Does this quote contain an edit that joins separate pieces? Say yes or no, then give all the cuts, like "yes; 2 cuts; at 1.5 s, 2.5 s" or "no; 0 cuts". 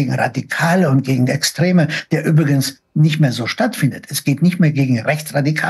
no; 0 cuts